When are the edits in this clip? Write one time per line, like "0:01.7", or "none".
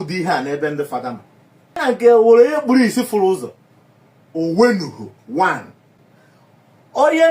0:01.8